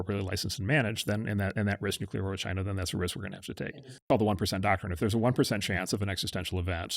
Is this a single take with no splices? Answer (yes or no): no